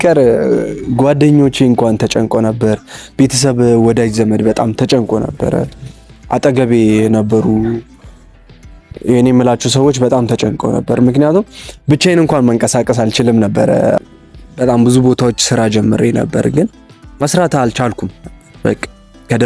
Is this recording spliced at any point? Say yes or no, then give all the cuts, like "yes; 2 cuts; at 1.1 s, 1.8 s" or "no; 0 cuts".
yes; 1 cut; at 14.0 s